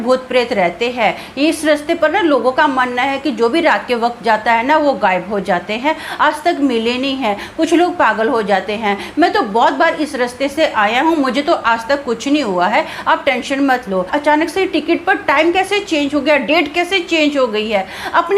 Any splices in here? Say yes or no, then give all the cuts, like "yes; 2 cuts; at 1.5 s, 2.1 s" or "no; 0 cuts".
yes; 1 cut; at 14.1 s